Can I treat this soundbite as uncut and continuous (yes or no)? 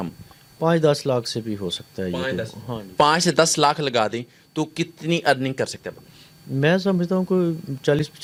yes